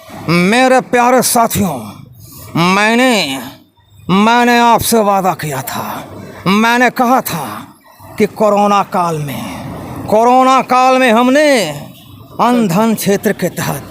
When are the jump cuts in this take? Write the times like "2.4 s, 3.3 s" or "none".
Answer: none